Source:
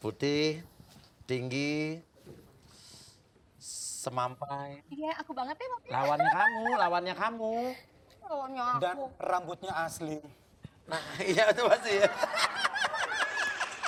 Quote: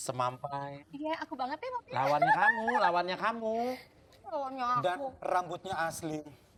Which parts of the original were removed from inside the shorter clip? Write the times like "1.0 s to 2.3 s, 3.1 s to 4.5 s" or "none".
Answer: none